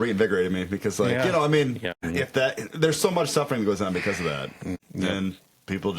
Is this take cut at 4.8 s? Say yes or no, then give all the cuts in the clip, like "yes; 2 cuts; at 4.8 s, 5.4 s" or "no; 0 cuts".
yes; 2 cuts; at 1.9 s, 4.8 s